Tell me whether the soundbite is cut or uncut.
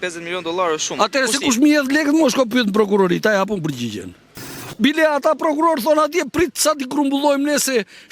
cut